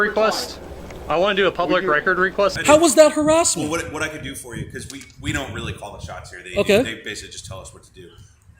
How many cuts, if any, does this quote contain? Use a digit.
1